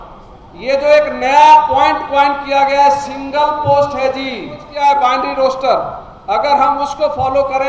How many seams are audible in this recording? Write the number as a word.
one